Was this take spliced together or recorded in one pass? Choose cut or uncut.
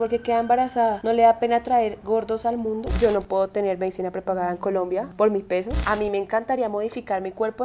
cut